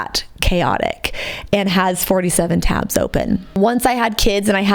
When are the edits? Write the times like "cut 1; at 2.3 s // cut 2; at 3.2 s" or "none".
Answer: cut 1; at 3.6 s